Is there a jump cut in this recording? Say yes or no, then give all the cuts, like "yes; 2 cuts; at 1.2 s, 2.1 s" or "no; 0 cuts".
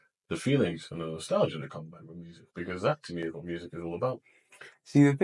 no; 0 cuts